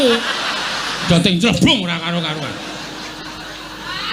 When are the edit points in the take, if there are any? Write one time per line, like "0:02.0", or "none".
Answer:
0:01.0